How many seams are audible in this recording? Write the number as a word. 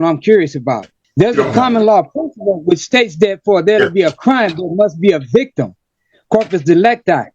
one